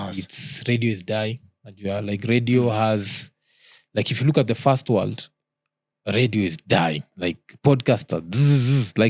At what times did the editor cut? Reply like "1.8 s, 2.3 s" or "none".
none